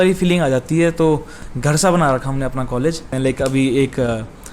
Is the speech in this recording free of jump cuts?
no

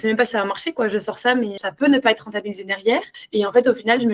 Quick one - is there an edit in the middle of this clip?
yes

